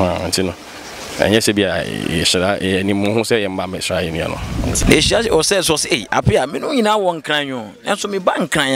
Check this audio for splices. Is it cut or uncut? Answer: cut